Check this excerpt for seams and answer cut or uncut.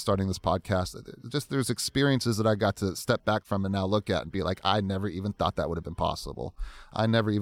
uncut